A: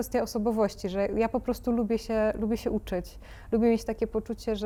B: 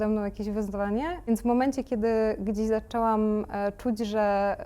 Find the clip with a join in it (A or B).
B